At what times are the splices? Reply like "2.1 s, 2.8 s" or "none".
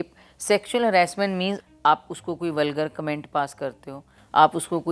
1.6 s